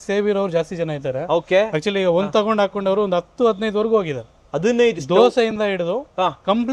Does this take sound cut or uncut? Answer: uncut